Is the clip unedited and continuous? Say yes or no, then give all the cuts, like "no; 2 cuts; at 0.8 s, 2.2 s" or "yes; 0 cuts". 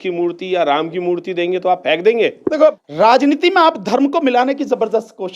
no; 1 cut; at 2.7 s